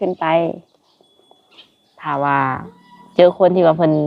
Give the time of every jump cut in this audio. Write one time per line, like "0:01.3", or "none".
0:02.1